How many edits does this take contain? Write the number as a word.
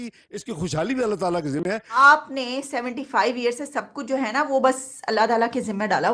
one